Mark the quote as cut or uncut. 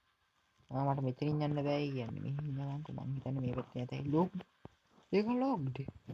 uncut